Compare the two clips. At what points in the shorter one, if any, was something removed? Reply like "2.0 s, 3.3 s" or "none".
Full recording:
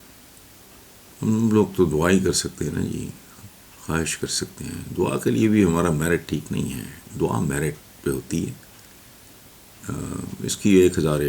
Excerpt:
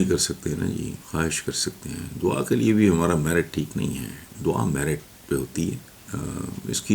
1.0 s, 5.9 s